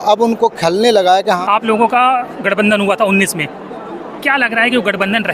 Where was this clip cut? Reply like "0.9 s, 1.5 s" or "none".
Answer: 1.4 s